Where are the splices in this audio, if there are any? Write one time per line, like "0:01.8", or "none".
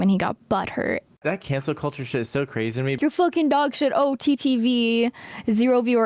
0:01.2
0:03.0